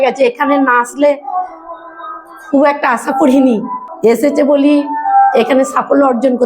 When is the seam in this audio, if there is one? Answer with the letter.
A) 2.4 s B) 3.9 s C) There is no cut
B